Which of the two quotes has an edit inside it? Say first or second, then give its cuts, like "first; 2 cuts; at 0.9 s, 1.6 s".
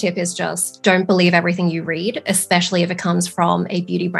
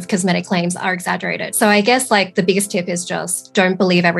second; 1 cut; at 1.4 s